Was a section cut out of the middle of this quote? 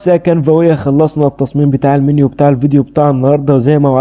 no; 0 cuts

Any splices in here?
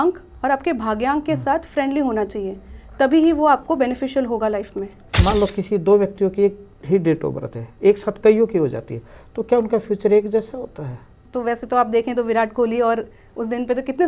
yes; 2 cuts; at 5.1 s, 11.2 s

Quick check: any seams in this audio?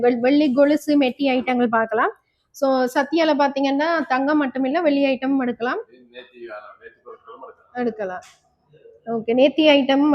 no; 0 cuts

